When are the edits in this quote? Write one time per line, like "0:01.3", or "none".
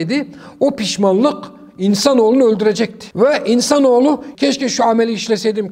0:03.0
0:04.3